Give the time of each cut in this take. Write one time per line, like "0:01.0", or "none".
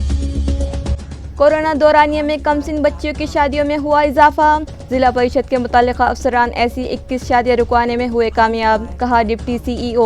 none